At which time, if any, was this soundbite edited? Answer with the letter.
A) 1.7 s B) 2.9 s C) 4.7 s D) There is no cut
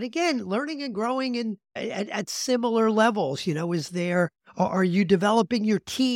A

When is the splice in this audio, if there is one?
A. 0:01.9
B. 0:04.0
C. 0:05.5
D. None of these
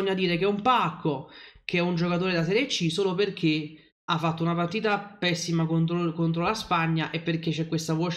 D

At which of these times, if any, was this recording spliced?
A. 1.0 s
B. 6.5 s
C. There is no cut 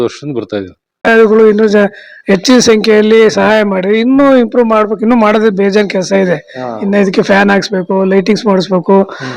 A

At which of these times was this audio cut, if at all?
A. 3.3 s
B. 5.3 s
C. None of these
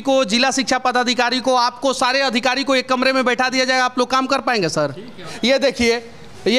B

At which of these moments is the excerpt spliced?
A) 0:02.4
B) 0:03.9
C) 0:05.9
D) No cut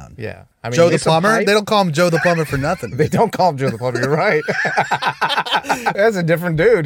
C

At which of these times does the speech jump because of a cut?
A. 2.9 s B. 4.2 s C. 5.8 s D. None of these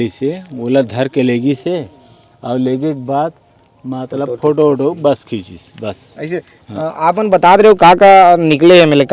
D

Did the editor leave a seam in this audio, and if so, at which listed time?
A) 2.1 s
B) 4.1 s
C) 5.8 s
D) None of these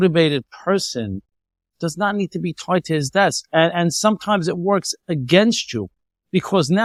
D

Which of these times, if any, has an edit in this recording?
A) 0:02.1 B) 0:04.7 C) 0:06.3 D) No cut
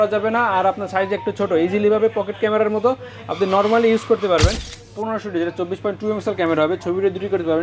B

